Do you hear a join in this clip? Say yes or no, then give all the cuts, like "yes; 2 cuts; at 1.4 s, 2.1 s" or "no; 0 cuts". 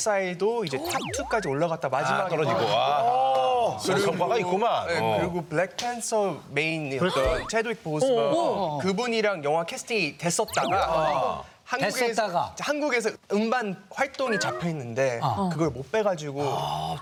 no; 0 cuts